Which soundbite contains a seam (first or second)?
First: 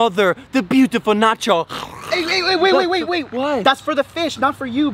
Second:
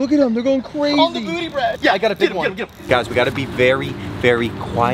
second